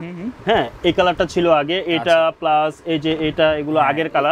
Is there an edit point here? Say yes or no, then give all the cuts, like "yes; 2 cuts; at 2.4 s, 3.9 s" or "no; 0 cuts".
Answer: no; 0 cuts